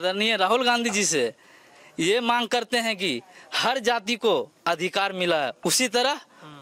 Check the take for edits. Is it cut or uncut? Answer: uncut